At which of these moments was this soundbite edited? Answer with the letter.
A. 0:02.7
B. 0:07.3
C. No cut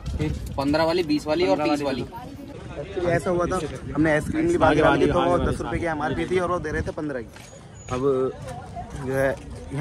A